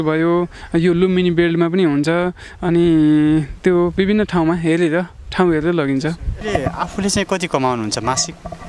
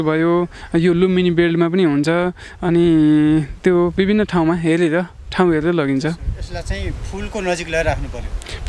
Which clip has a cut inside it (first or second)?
first